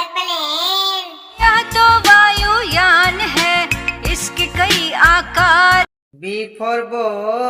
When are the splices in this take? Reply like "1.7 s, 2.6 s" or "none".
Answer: 1.2 s, 6.0 s

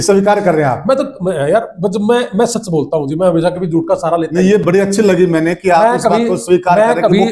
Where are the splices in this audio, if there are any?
none

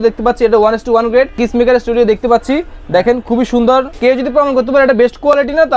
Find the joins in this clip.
1.4 s, 3.9 s

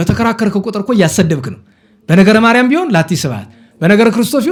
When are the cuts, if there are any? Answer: none

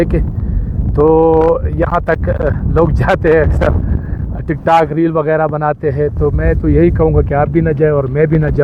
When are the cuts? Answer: none

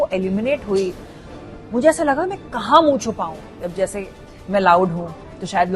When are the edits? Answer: 3.5 s

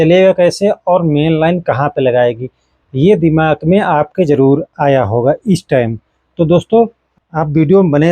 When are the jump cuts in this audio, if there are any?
7.0 s

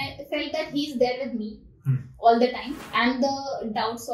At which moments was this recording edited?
2.8 s

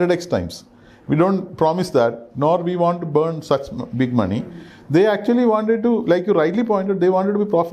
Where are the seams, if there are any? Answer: none

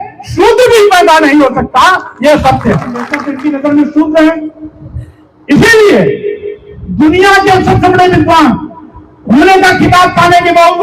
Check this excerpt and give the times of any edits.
3.2 s

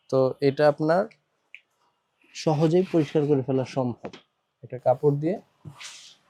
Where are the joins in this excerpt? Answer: none

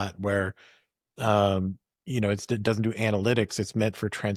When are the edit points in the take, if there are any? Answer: none

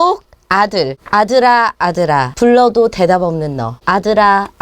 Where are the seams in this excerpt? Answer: 1.0 s, 2.3 s, 3.7 s

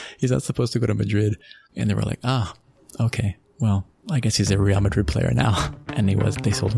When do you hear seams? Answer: none

